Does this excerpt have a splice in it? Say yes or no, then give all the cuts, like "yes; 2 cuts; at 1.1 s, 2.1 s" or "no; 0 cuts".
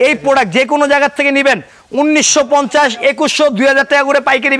no; 0 cuts